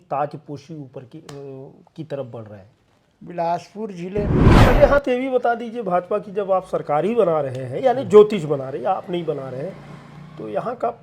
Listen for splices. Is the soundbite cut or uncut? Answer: cut